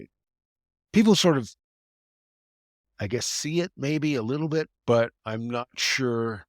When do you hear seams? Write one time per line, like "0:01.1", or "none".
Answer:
0:04.7